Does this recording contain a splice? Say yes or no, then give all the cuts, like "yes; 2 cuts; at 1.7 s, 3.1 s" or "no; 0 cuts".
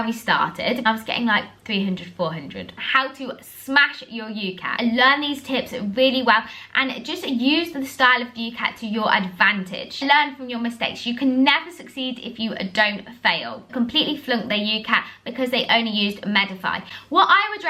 yes; 4 cuts; at 2.8 s, 4.7 s, 10.0 s, 13.7 s